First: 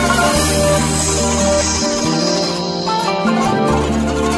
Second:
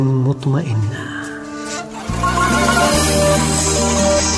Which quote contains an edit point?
second; 1 cut; at 1.0 s

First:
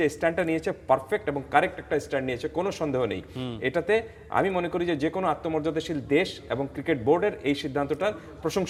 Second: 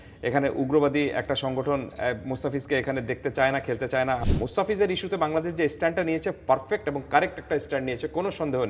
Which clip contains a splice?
second; 1 cut; at 4.2 s

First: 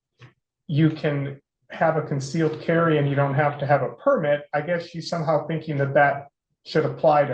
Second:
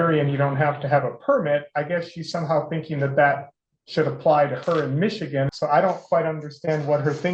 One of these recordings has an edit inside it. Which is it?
second; 1 cut; at 5.5 s

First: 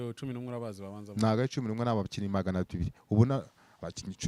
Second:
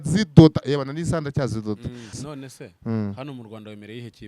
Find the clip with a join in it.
second; 1 cut; at 2.2 s

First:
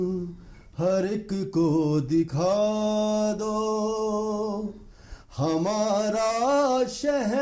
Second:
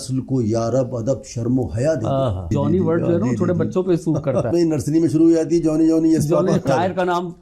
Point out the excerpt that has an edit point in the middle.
second; 3 cuts; at 2.5 s, 4.5 s, 6.6 s

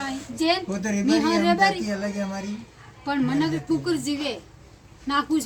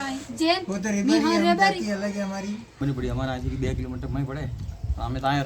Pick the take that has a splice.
second; 1 cut; at 2.7 s

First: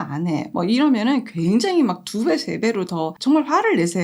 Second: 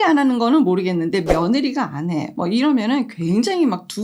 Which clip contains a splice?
first; 1 cut; at 3.1 s

